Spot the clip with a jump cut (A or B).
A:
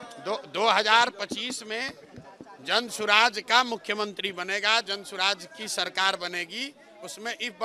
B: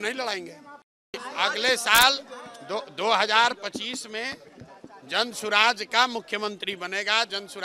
B